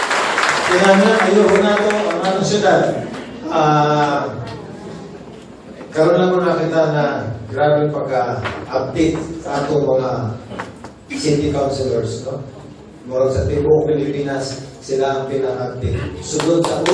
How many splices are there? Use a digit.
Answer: 0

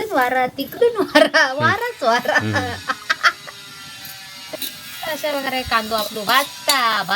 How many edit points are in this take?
1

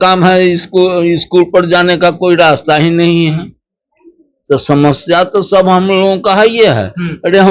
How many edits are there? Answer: 0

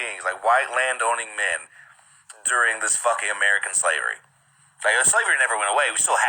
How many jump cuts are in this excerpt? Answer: 2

